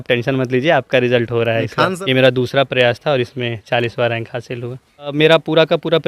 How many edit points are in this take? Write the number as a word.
two